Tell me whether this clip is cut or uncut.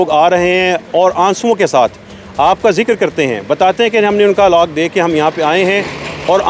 uncut